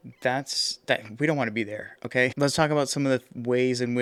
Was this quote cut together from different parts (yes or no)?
no